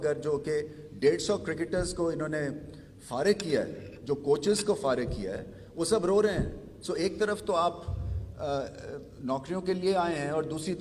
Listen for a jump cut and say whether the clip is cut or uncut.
uncut